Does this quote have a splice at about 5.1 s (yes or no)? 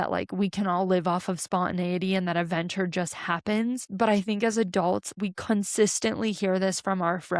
yes